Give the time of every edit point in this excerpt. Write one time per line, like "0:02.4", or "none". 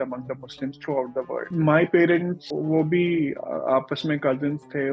0:01.5
0:02.4